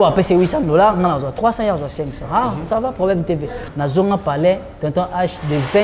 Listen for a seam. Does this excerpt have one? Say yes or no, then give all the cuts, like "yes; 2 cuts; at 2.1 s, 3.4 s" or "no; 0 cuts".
yes; 1 cut; at 3.6 s